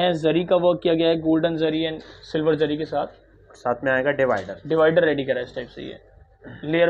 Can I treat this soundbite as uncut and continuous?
yes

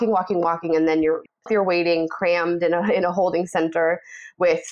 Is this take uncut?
no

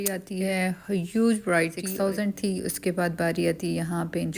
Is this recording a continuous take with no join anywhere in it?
no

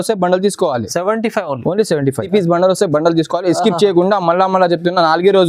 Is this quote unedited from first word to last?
no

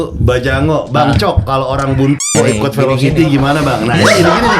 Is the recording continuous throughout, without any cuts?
yes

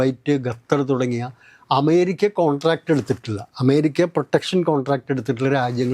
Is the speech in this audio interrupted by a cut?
no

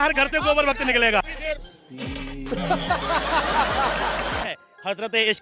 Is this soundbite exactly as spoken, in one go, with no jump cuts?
no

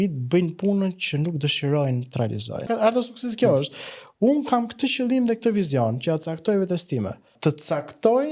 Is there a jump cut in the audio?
yes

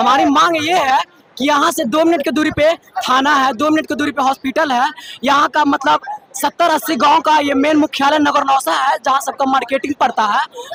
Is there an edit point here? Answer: no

